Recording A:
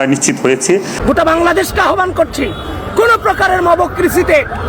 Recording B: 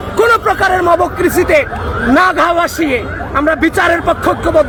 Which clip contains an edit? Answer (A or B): A